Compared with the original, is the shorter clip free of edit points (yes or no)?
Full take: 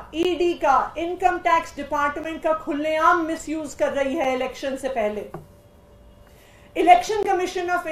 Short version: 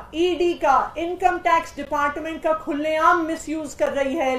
yes